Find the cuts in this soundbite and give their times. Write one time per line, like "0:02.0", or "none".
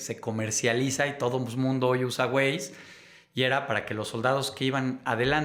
none